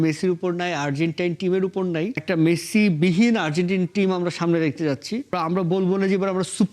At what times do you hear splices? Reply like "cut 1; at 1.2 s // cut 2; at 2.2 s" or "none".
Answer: cut 1; at 2.2 s // cut 2; at 5.3 s